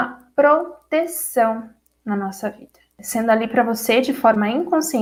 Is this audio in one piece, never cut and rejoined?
yes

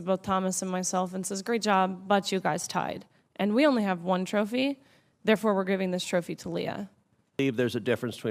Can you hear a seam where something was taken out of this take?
yes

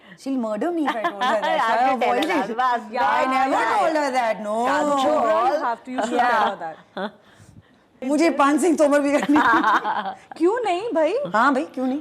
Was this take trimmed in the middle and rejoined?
yes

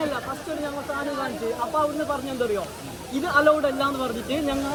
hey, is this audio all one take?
yes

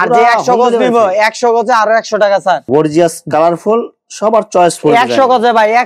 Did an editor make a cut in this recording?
yes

